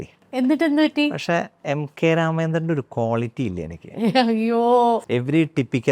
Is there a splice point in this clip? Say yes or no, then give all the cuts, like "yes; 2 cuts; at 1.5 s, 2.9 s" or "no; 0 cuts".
yes; 1 cut; at 5.0 s